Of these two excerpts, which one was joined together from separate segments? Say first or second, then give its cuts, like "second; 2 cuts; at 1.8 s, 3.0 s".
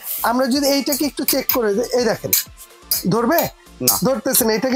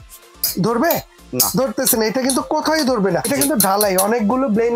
second; 1 cut; at 3.2 s